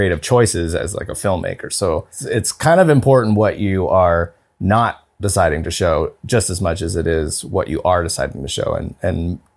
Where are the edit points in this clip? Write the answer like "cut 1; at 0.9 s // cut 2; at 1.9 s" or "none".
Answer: cut 1; at 2.2 s